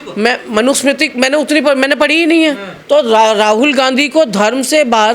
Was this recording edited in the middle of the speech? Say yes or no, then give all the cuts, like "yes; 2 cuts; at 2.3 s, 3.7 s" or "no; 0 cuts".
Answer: yes; 1 cut; at 2.7 s